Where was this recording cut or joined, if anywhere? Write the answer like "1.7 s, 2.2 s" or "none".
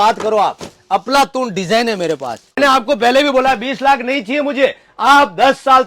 2.6 s